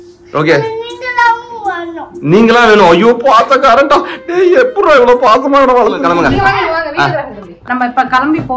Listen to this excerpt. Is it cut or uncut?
cut